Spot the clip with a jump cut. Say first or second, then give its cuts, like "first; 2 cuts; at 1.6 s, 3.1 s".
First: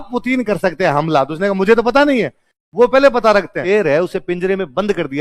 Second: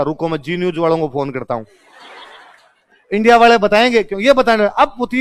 first; 1 cut; at 3.6 s